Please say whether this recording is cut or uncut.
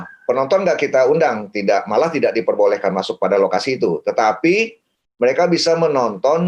uncut